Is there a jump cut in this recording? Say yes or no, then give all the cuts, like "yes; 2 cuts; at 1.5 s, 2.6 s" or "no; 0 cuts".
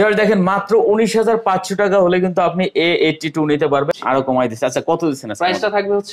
yes; 1 cut; at 3.9 s